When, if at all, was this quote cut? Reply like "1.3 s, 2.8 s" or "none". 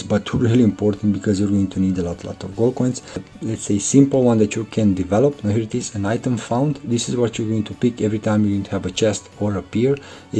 3.3 s